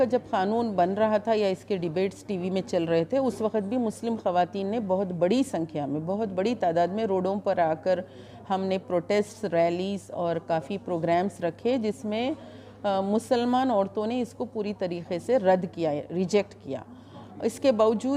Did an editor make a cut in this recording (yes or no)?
no